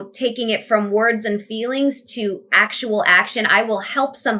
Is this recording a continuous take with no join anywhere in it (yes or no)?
yes